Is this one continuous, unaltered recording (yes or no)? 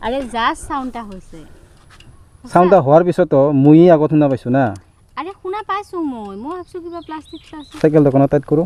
yes